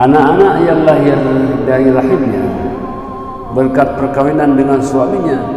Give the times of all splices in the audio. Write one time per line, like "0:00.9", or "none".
none